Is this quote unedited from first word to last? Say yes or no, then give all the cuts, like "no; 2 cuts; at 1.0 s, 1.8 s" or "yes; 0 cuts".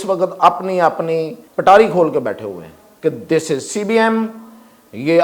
no; 1 cut; at 1.4 s